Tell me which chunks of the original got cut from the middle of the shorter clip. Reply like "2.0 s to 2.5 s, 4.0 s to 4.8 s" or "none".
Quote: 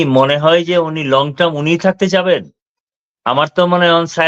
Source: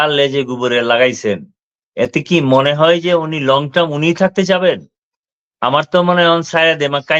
none